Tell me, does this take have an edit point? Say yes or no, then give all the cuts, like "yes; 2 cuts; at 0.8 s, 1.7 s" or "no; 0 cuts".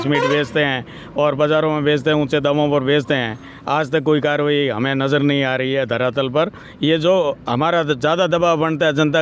no; 0 cuts